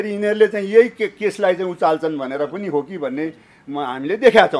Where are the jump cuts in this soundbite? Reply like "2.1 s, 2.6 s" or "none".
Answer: none